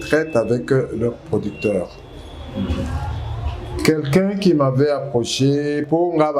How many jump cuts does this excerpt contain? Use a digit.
0